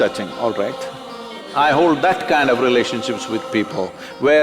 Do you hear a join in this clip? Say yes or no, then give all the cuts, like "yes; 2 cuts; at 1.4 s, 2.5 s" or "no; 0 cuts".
yes; 1 cut; at 1.4 s